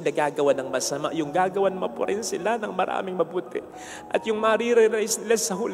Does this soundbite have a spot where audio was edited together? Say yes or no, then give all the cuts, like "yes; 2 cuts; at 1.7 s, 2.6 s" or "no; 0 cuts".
no; 0 cuts